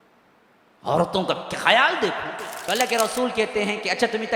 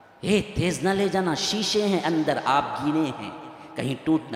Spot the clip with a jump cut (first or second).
first